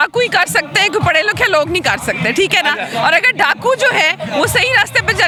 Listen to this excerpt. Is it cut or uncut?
uncut